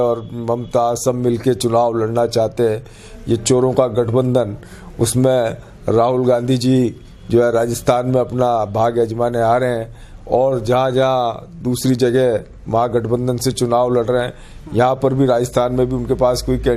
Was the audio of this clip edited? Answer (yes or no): no